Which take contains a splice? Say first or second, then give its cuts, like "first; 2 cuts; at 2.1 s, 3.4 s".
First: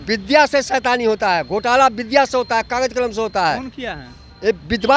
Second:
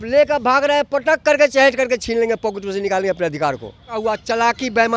second; 1 cut; at 4.0 s